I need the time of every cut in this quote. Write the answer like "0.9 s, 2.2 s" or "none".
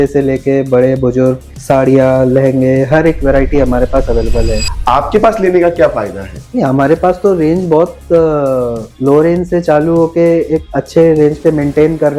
4.6 s